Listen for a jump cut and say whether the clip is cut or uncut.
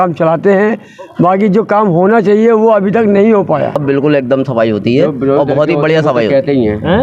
cut